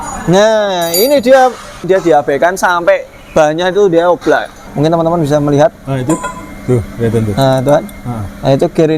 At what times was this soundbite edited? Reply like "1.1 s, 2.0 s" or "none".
1.8 s, 4.6 s